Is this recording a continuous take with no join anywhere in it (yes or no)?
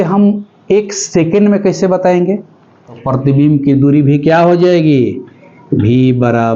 no